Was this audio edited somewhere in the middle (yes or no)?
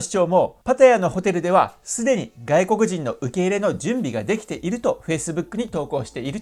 no